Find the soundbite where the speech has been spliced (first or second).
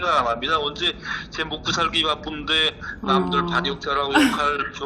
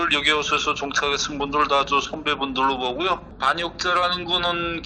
second